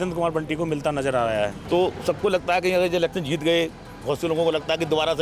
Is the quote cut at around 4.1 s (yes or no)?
no